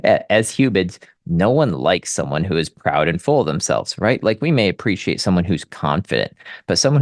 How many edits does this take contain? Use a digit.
0